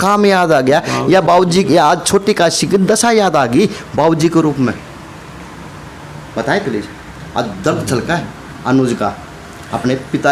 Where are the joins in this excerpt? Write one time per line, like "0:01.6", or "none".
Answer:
none